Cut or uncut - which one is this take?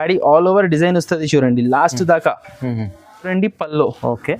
cut